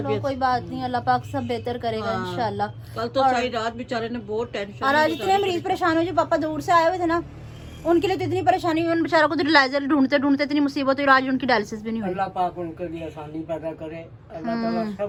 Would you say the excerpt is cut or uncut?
uncut